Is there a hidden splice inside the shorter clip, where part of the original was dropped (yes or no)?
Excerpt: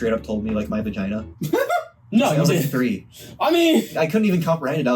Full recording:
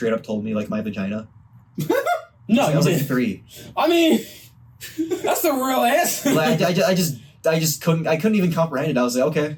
yes